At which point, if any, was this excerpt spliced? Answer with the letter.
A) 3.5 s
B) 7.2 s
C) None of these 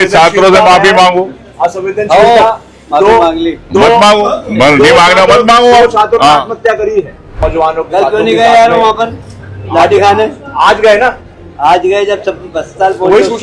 B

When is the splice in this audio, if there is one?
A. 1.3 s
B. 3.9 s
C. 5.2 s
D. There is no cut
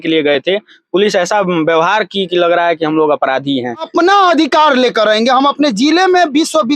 B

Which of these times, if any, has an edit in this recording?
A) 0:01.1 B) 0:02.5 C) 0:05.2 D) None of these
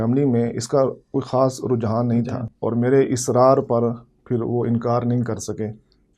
B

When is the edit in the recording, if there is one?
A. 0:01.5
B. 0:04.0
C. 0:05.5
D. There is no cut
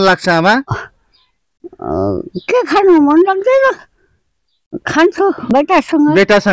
C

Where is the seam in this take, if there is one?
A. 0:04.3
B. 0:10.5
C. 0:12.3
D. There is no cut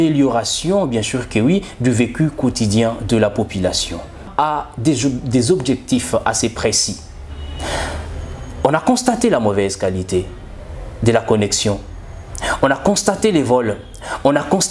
A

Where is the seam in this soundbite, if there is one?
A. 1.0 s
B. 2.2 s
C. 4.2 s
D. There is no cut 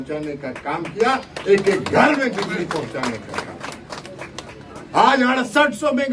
D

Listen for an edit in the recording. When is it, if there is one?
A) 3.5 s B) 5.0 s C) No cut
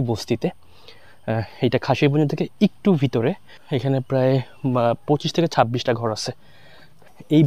A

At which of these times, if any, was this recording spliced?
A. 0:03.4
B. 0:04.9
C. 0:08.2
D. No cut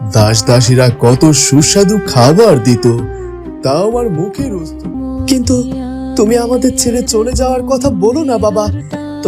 B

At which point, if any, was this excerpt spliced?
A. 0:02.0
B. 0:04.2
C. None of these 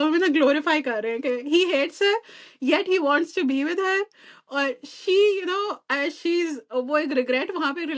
C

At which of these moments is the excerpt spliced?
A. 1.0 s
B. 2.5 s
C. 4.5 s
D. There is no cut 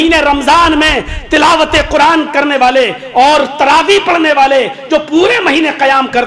D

